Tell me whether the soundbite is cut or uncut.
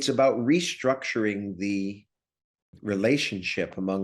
uncut